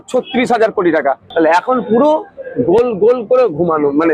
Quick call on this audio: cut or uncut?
cut